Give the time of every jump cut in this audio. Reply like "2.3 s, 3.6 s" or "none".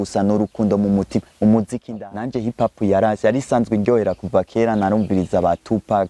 1.8 s